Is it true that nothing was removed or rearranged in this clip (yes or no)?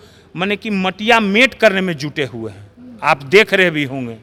yes